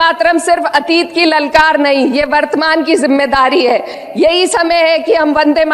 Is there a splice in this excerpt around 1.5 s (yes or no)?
no